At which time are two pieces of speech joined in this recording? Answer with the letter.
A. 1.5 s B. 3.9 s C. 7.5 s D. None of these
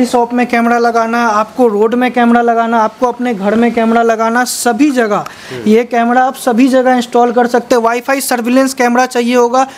D